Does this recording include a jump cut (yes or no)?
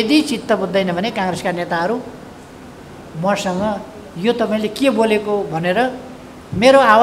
no